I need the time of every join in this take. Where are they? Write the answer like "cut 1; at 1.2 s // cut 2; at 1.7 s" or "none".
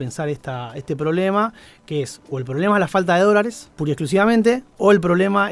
cut 1; at 3.7 s // cut 2; at 4.7 s